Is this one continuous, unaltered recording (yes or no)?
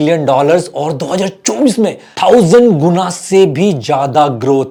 yes